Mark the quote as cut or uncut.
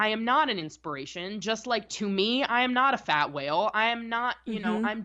uncut